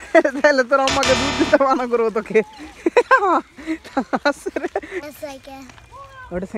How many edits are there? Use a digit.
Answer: 1